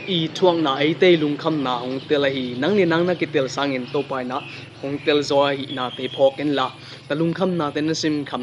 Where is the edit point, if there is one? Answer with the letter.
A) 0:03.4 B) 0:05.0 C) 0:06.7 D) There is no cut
D